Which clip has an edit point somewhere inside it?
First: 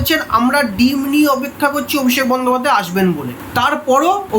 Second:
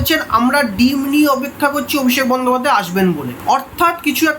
first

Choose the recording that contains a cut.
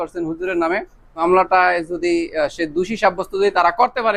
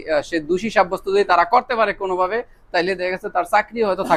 first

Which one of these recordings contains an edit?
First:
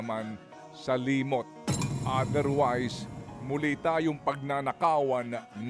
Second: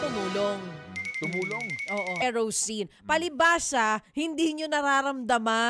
second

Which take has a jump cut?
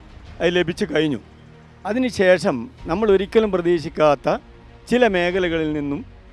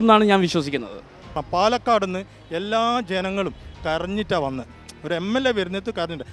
second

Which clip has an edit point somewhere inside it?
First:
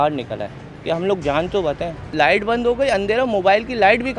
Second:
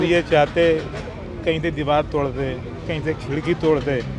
first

